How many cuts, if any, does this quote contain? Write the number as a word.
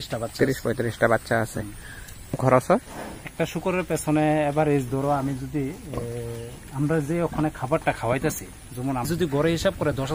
two